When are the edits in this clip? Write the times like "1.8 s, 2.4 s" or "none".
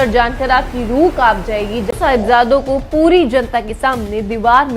1.9 s